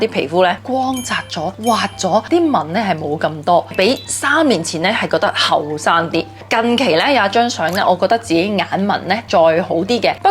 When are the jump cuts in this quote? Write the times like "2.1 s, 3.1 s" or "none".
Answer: none